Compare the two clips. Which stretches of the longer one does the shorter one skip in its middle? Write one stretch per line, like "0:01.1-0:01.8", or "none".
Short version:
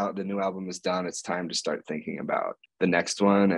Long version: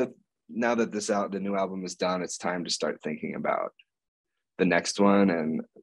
0:03.8-0:04.4